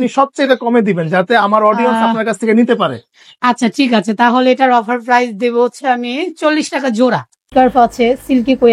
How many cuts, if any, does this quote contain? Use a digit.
1